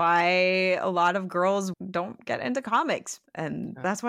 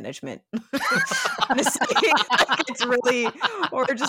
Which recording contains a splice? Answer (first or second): first